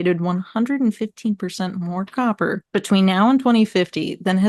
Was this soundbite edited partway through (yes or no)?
yes